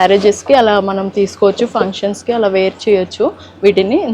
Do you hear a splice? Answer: no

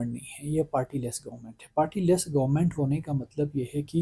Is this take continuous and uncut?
yes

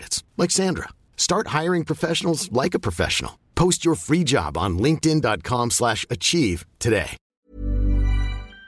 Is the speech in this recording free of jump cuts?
no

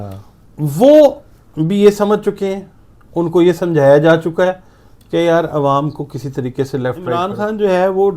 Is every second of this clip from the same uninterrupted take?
no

